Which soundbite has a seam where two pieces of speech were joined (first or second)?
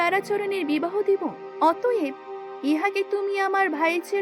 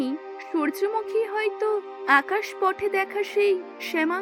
first